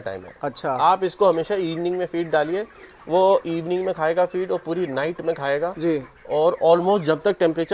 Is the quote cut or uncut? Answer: uncut